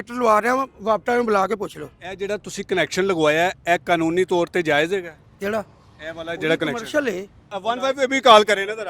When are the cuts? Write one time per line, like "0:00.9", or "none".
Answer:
0:07.5